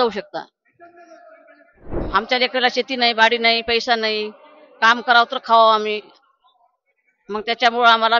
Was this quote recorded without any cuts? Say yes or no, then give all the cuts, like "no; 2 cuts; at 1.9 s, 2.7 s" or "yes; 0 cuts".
no; 1 cut; at 1.9 s